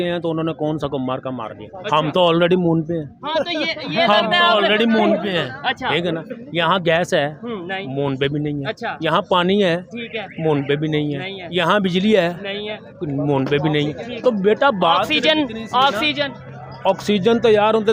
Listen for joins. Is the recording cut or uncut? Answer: uncut